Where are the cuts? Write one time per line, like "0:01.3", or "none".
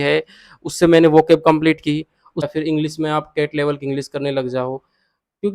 0:02.3